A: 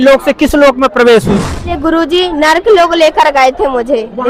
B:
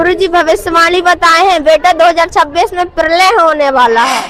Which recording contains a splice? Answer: A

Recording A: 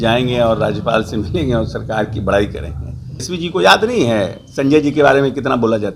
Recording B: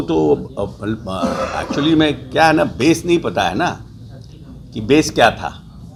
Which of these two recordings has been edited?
A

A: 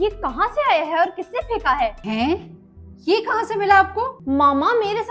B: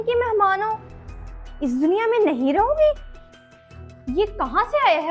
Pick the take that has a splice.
A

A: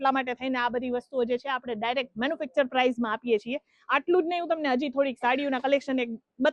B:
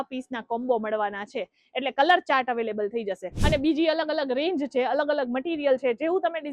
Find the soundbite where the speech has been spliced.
B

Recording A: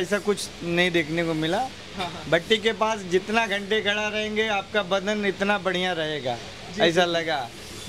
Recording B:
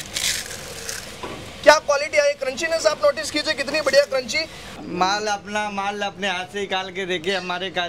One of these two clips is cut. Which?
B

